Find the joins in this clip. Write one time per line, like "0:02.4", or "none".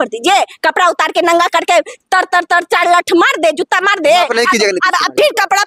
none